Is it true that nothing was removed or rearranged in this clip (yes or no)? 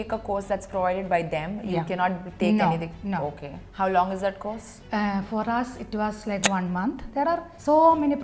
no